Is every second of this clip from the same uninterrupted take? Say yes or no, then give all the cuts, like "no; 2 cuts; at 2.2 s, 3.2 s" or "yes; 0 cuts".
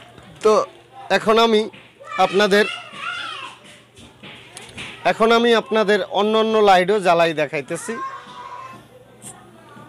yes; 0 cuts